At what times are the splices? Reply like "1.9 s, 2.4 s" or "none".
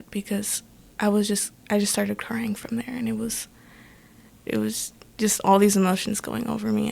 4.4 s